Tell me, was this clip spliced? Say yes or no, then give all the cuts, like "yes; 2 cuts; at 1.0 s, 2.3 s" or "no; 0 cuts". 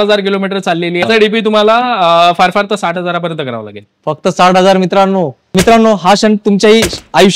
yes; 2 cuts; at 1.0 s, 5.5 s